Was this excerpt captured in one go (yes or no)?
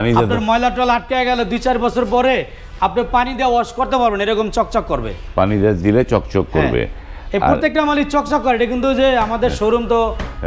yes